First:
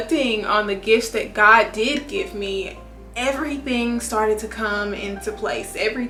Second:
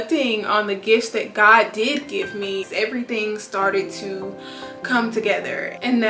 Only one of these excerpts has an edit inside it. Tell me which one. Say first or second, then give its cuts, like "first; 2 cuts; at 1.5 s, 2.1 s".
second; 1 cut; at 2.7 s